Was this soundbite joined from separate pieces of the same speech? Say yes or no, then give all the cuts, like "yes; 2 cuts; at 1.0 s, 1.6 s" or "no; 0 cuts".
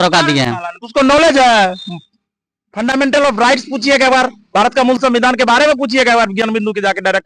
no; 0 cuts